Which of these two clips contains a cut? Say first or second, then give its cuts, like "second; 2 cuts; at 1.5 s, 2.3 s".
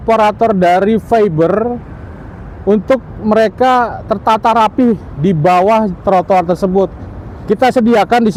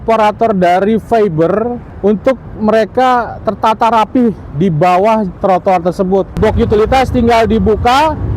second; 2 cuts; at 1.8 s, 6.3 s